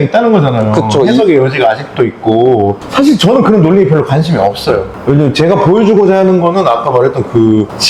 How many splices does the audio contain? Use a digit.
1